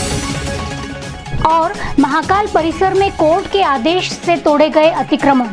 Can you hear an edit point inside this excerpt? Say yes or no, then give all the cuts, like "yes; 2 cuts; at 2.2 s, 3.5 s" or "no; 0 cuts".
no; 0 cuts